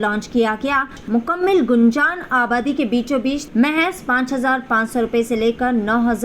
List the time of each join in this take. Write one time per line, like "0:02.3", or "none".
0:01.0
0:03.4